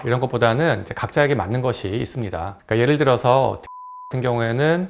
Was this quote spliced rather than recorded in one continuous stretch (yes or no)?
no